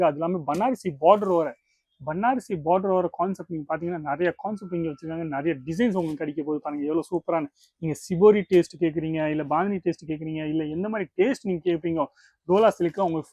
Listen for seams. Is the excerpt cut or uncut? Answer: uncut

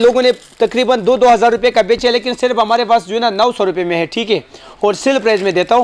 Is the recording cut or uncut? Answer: uncut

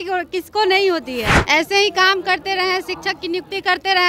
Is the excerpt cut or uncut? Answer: cut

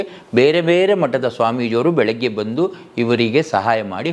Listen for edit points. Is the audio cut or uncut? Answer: uncut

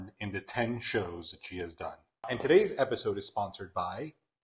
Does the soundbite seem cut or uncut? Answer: cut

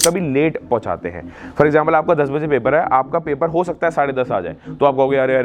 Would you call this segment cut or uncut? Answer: uncut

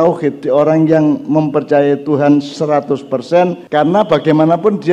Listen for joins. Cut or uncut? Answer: cut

